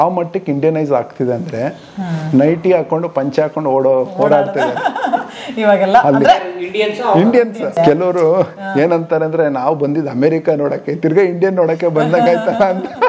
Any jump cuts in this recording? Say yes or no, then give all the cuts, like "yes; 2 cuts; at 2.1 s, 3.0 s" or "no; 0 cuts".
no; 0 cuts